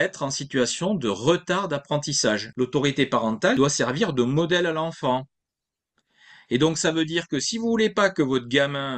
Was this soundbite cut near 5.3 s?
no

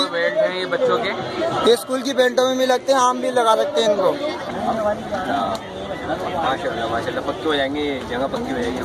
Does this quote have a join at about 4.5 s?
yes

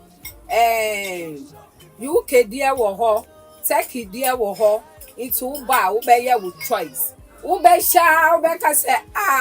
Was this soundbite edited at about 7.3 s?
no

